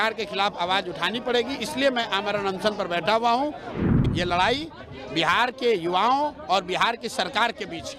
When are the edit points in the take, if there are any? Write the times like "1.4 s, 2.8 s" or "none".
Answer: 3.7 s